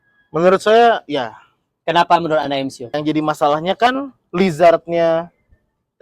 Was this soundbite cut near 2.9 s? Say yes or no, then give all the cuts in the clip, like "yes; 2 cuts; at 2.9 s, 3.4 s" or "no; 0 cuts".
yes; 1 cut; at 2.9 s